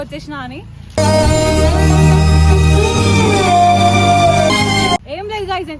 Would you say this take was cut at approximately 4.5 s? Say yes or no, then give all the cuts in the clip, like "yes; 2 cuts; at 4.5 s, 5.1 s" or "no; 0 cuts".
yes; 1 cut; at 4.5 s